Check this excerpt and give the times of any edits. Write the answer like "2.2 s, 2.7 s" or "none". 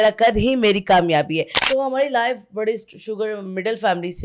1.5 s

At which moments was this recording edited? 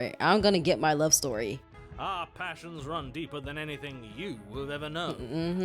1.8 s

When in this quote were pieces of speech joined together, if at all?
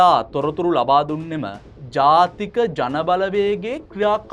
none

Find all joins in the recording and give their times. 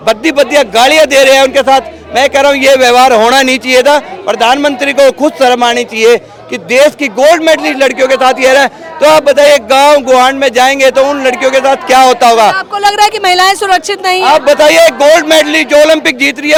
none

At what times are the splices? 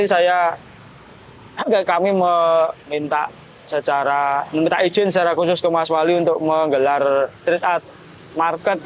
none

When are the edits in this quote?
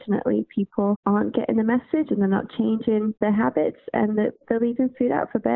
1.0 s, 3.2 s

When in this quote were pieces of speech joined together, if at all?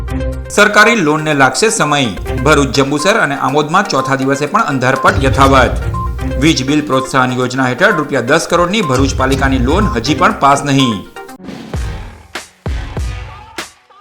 11.3 s

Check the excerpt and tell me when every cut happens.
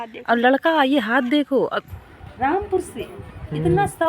1.9 s

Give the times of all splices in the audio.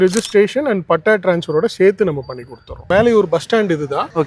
2.9 s

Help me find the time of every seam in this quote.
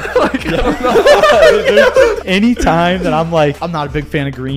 2.2 s, 3.6 s

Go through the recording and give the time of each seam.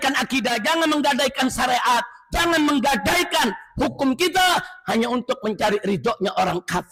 none

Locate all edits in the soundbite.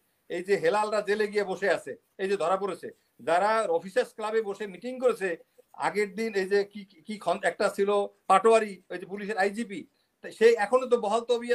none

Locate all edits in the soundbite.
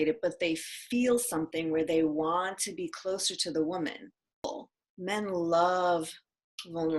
4.4 s

